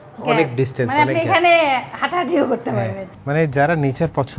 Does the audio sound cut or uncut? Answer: cut